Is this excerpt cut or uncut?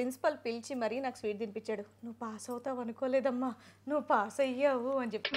uncut